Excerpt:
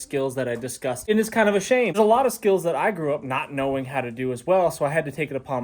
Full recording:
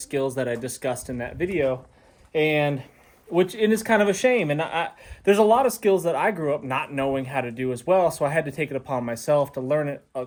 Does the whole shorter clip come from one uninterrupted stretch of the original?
no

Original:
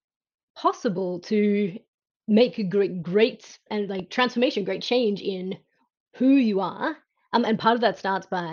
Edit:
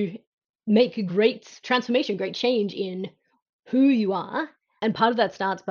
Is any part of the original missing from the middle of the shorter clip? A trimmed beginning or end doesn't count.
yes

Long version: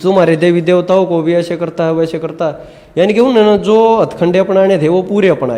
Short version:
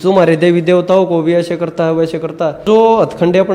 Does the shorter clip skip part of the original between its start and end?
yes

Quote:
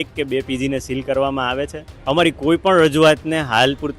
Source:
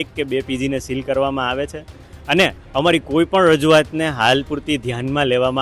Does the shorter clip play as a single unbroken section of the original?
no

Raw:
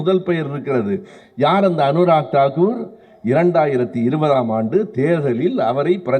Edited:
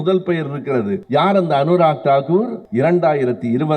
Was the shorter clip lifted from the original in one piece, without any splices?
no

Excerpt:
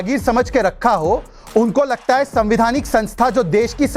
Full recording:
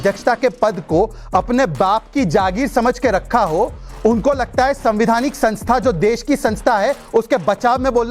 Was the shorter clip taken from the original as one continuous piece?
yes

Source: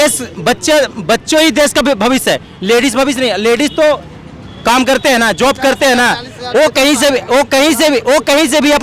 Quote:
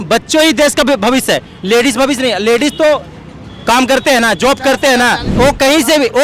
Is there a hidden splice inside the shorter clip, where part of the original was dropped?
yes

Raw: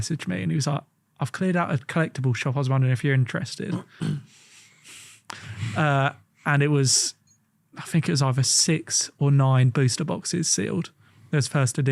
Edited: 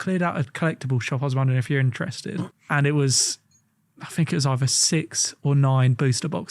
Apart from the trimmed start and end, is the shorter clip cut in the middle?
yes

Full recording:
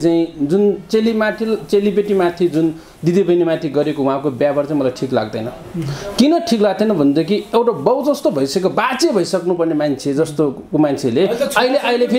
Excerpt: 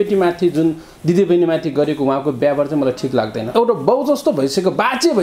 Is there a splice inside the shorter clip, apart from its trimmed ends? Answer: yes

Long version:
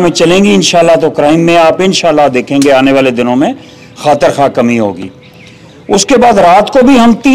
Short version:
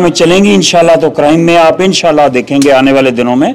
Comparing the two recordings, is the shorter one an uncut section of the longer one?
yes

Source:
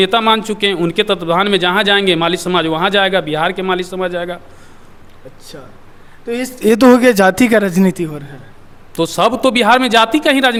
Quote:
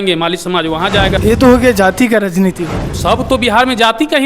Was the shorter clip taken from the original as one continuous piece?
no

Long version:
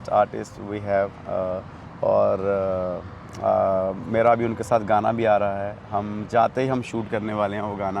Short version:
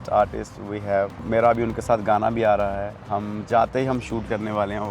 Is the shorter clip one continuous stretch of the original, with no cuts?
no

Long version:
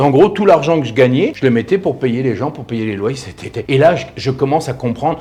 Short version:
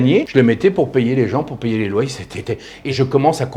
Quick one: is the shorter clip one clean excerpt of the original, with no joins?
no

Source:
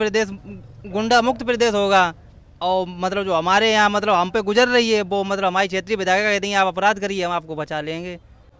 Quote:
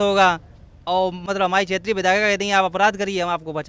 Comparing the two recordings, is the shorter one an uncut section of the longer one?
no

